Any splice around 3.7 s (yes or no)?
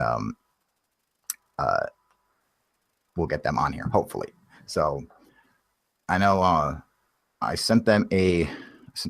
yes